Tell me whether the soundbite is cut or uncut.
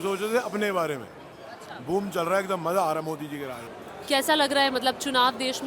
uncut